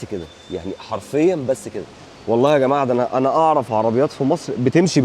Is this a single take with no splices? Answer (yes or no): yes